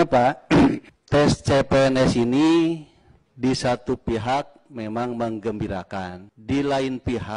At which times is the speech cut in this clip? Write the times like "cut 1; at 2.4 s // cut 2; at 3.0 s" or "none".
cut 1; at 0.9 s // cut 2; at 6.3 s